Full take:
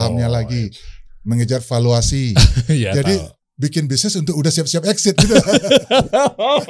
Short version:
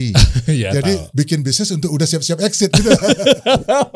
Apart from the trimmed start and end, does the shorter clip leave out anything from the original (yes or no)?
yes